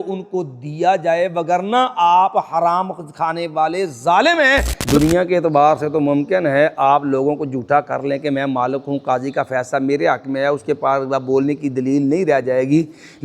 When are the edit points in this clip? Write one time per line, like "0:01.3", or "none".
0:04.7